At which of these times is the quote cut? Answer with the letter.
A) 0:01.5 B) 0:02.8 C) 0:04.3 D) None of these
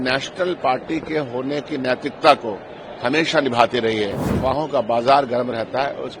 C